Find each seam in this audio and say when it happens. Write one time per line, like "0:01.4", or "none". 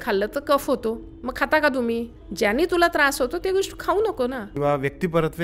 0:02.2
0:04.4